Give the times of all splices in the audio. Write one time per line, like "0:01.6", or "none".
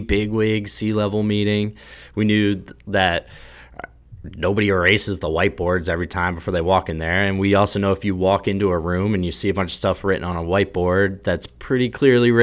none